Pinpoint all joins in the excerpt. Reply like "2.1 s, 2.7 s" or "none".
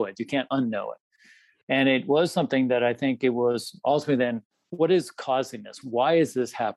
4.4 s, 5.8 s